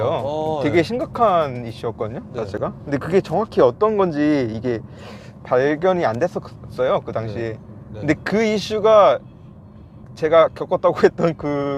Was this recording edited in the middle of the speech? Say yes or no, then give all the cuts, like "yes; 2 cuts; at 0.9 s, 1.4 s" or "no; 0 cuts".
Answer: no; 0 cuts